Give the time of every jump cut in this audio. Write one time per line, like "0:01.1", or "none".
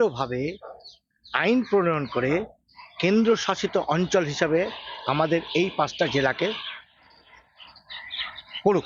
none